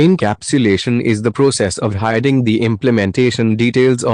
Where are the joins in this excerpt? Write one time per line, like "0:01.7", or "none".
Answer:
0:01.1

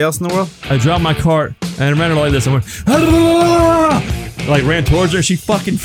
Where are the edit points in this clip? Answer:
0:00.7
0:01.6

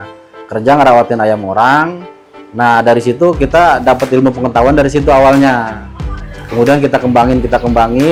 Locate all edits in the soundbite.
none

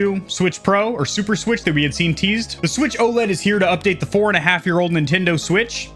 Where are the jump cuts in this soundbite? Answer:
none

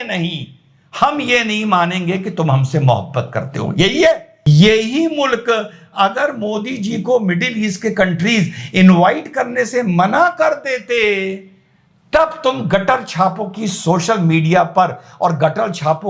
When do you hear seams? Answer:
0:04.4

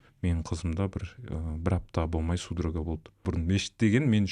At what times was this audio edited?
0:03.3

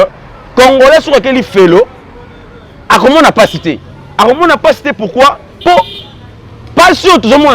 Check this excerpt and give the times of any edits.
none

